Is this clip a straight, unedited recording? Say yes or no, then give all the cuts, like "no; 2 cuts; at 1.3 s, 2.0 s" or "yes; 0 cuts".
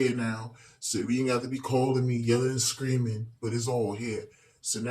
yes; 0 cuts